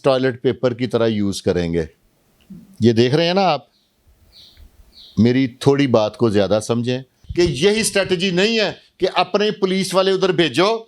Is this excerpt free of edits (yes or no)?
no